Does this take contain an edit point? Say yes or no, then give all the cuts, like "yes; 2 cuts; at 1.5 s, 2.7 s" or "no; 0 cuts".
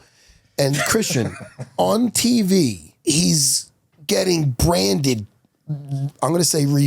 yes; 1 cut; at 2.9 s